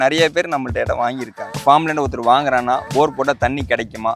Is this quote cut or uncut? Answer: cut